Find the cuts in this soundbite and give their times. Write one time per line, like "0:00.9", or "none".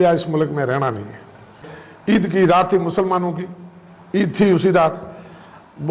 0:01.6